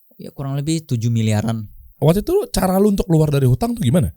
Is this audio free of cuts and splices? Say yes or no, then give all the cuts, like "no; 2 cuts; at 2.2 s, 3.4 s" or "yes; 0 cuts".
no; 1 cut; at 1.9 s